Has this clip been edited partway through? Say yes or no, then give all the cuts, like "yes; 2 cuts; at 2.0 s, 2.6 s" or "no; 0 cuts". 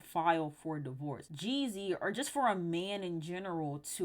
yes; 1 cut; at 1.3 s